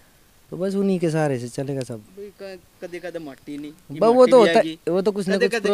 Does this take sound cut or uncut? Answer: uncut